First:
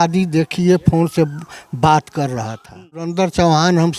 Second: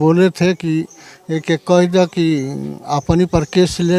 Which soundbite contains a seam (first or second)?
first